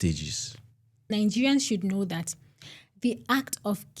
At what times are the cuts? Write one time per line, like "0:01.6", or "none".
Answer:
0:01.1